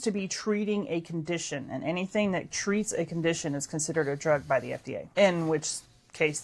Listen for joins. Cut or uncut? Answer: cut